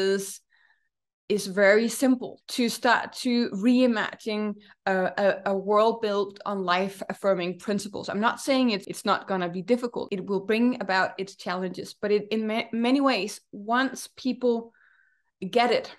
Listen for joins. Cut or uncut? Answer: cut